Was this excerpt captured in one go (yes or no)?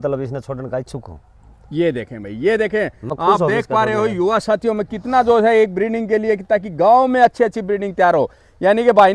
yes